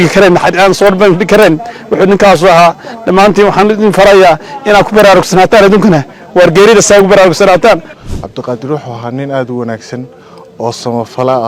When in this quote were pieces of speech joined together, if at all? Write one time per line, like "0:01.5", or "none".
none

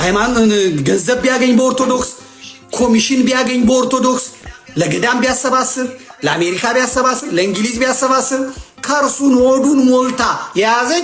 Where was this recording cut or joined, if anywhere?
none

